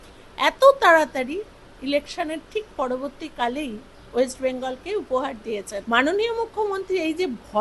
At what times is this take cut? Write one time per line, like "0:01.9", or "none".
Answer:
0:05.7